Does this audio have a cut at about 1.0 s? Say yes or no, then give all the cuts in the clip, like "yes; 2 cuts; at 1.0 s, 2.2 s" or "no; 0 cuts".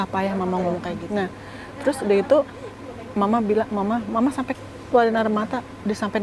yes; 1 cut; at 1.0 s